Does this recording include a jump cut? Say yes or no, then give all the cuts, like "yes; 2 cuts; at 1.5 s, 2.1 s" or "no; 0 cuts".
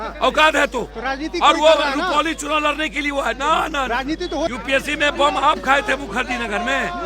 yes; 1 cut; at 4.5 s